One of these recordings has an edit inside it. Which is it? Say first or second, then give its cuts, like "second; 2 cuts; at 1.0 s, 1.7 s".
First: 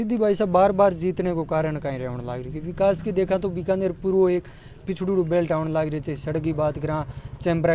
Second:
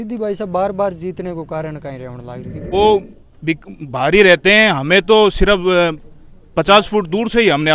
second; 1 cut; at 2.7 s